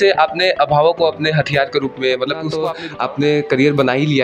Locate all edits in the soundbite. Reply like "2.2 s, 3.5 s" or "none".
2.8 s